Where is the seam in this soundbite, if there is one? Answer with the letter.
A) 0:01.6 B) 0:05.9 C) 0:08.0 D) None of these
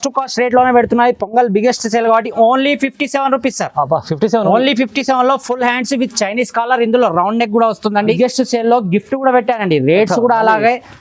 C